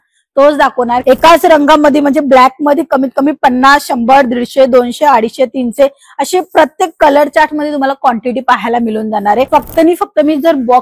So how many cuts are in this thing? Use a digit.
2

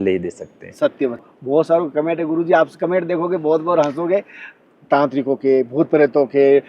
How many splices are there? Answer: 1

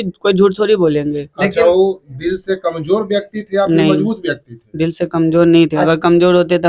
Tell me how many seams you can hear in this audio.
0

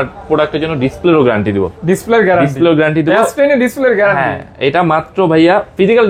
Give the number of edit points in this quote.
0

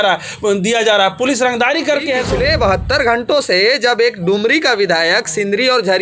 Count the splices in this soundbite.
1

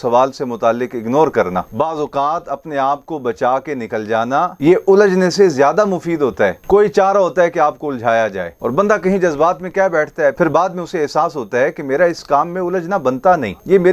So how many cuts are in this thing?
0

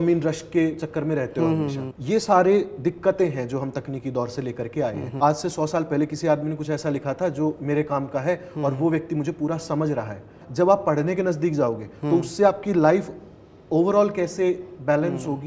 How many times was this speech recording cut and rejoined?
3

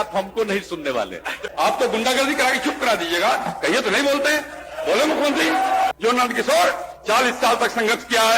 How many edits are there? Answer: 2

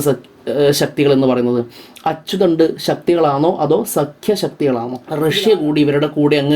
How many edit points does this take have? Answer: 1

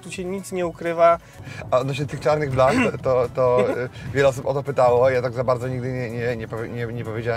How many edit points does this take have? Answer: 1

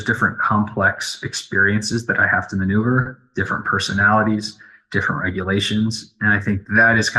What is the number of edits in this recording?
0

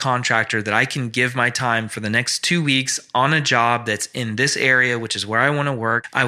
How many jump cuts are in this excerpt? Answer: 0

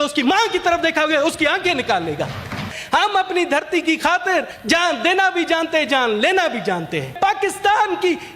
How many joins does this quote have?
3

